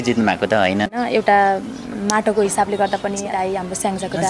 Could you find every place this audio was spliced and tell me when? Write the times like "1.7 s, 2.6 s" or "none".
0.9 s, 3.3 s